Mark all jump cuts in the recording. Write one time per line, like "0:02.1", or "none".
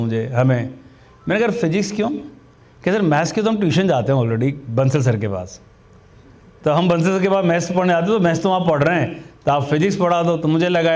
none